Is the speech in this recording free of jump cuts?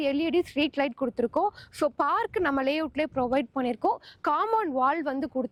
yes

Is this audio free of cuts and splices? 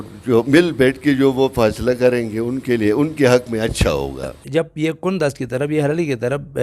no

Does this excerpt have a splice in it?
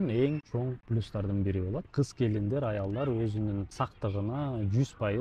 yes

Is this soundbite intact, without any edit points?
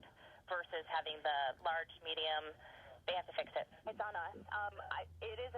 no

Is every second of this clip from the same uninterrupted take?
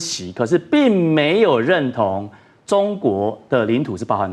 yes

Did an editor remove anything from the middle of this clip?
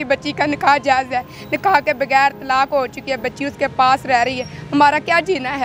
no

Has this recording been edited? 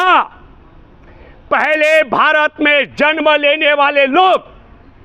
no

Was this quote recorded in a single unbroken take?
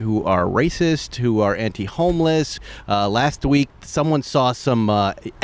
no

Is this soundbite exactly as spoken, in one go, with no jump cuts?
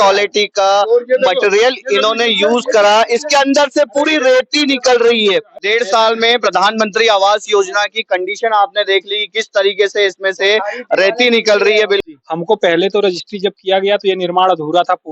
no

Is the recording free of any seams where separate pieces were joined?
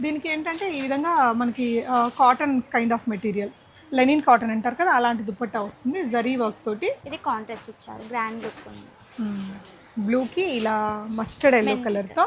no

